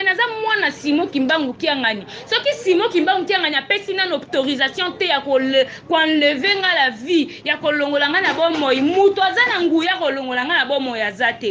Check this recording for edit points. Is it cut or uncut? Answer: uncut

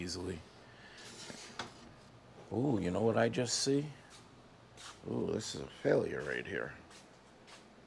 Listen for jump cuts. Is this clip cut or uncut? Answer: cut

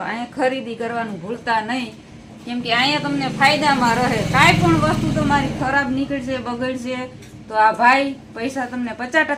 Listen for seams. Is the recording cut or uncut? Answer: uncut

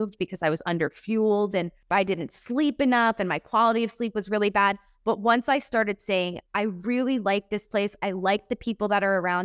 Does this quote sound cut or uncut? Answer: cut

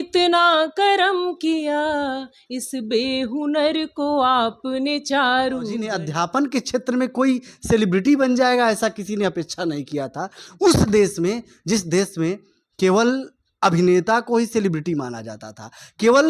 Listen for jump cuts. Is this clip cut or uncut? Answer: cut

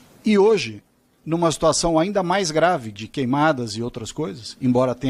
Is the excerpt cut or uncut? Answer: uncut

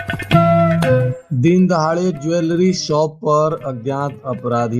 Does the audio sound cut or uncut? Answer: cut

